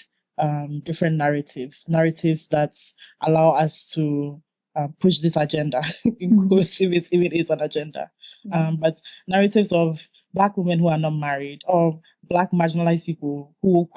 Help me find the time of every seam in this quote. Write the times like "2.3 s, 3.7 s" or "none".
none